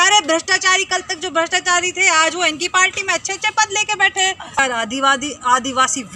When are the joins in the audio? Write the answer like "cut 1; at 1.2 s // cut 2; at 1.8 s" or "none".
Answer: cut 1; at 4.6 s